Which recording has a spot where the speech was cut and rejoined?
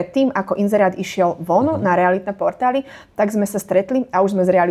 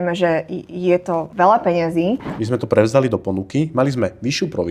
second; 2 cuts; at 1.3 s, 2.3 s

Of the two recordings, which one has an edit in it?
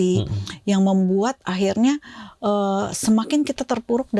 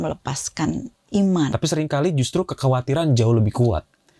second; 1 cut; at 1.5 s

